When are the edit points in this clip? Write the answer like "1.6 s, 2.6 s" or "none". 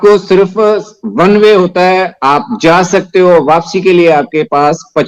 none